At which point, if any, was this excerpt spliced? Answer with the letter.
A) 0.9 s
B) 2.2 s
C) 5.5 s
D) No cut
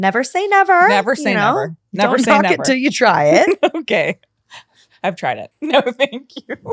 C